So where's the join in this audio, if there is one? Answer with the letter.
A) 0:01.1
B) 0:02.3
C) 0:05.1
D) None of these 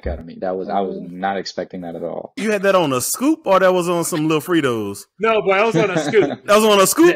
B